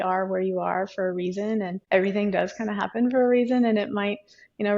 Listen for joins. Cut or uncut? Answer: cut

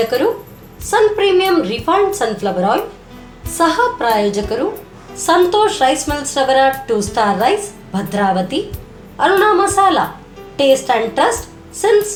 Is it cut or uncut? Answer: uncut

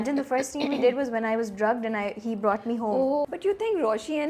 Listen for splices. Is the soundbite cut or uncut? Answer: cut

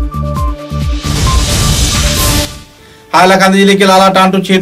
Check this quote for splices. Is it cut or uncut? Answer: cut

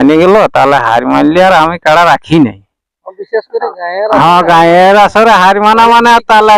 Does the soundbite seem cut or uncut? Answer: uncut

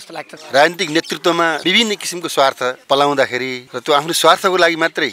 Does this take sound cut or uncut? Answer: uncut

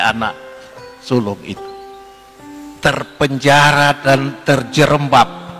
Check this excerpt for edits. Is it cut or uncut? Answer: cut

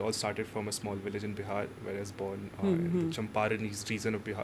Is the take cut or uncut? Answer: uncut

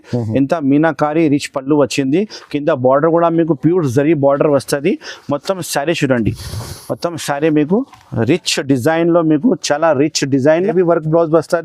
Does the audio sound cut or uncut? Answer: cut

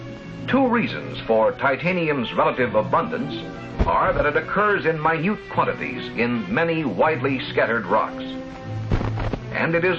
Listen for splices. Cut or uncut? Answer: uncut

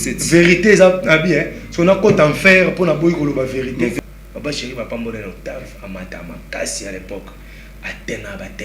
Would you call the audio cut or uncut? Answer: cut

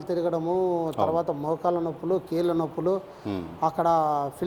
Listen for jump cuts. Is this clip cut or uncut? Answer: uncut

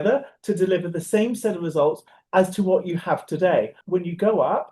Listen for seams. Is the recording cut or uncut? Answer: cut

